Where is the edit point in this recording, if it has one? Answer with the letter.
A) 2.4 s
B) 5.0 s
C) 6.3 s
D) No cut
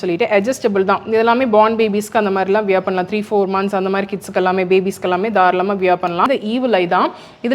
C